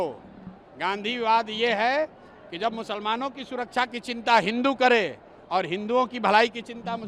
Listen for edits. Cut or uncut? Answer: uncut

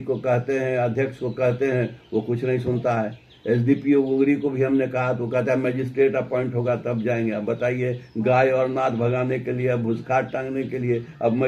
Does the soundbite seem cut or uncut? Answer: uncut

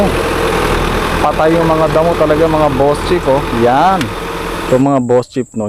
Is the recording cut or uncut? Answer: cut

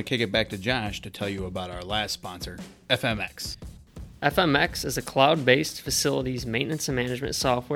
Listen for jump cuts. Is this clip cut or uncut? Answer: uncut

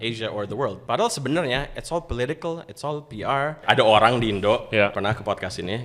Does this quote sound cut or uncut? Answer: cut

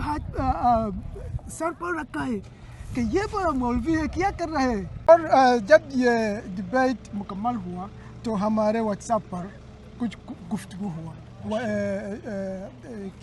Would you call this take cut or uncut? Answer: cut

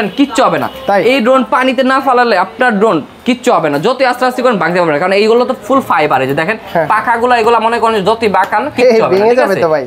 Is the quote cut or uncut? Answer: uncut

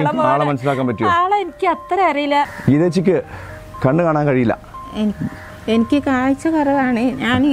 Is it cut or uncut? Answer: cut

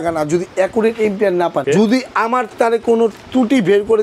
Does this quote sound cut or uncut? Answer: cut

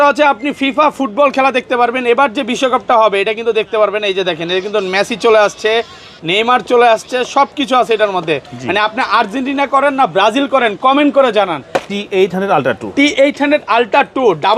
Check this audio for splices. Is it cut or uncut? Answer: cut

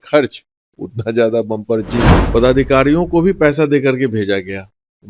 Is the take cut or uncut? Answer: cut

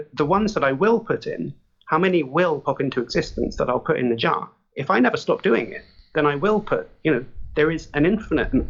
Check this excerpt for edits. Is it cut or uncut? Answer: uncut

